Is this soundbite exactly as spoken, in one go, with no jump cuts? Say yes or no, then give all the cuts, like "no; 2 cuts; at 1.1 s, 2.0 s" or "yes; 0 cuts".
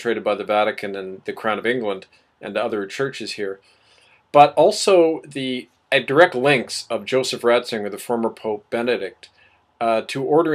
yes; 0 cuts